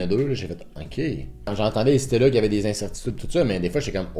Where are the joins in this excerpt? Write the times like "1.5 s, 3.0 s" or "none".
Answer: none